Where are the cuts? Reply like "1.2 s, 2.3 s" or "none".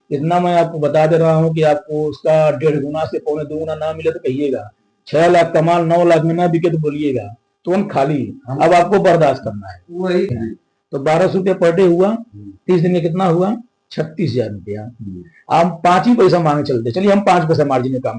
10.3 s